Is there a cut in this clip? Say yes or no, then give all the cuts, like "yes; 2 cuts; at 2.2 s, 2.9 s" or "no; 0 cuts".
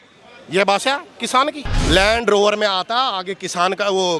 yes; 1 cut; at 1.7 s